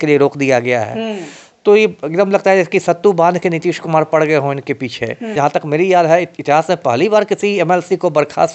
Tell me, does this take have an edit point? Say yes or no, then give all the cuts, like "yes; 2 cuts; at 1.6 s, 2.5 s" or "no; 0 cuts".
yes; 1 cut; at 5.3 s